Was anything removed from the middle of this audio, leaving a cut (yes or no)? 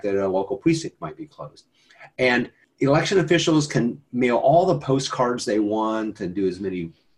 yes